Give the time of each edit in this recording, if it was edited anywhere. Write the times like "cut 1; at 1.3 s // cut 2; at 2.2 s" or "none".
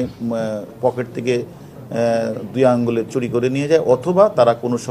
none